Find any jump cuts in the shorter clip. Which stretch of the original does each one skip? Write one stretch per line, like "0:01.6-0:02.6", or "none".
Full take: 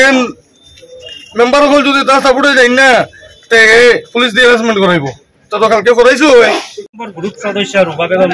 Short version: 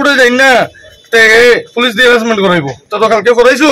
0:05.2-0:05.4

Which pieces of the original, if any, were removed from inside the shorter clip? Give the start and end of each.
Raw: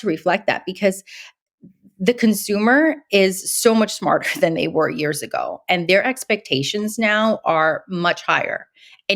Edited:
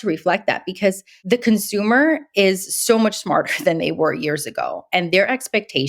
0:01.1-0:01.9

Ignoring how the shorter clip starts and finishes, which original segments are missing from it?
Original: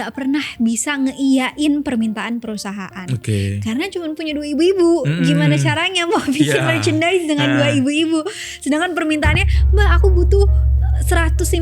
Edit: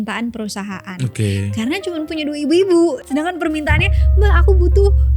0:05.1-0:08.6

